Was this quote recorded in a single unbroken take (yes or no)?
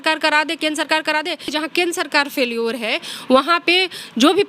no